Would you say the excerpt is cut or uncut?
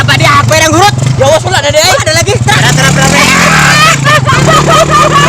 cut